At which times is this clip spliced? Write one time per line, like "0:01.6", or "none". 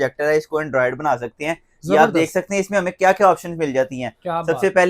none